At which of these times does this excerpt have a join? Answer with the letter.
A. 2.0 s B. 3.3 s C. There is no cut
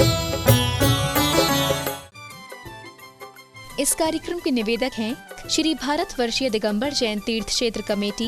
A